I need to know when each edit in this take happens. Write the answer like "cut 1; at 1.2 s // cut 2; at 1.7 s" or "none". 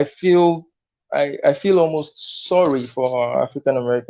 none